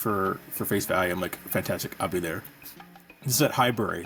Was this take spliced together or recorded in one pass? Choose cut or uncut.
uncut